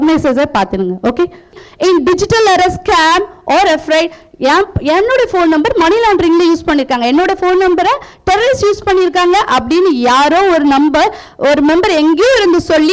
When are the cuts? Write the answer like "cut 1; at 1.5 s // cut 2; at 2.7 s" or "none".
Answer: cut 1; at 1.6 s